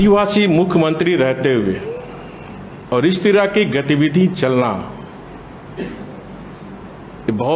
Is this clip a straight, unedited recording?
yes; 0 cuts

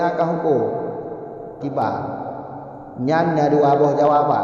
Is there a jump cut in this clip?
yes; 1 cut; at 1.6 s

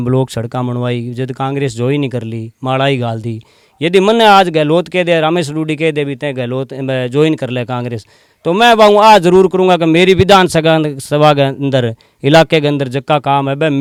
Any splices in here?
no; 0 cuts

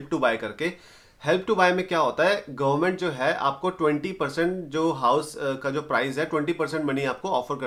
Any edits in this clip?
no; 0 cuts

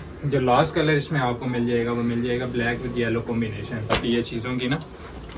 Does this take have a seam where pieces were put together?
yes; 1 cut; at 3.9 s

